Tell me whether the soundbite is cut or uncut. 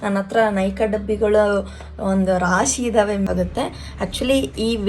cut